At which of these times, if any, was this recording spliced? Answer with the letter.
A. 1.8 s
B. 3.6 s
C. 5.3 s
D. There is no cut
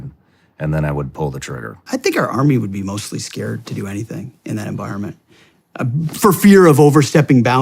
A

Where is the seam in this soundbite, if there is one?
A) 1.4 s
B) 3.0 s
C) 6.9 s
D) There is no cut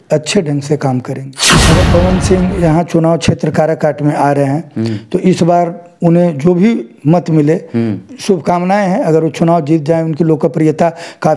A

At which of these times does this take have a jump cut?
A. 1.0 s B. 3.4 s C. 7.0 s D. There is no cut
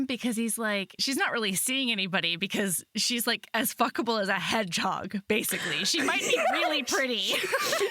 A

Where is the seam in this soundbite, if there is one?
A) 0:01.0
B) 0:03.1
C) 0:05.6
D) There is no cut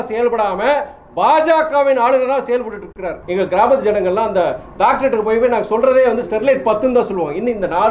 B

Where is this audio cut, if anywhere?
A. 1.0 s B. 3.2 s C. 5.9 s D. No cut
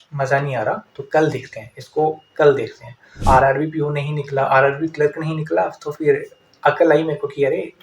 B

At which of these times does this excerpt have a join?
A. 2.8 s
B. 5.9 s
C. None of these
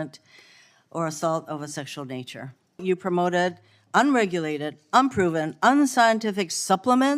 A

